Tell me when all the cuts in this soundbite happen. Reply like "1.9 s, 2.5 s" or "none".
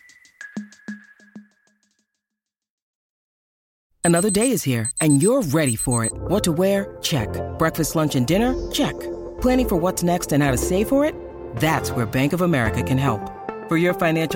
none